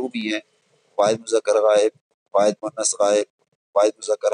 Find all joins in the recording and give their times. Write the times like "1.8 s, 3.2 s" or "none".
none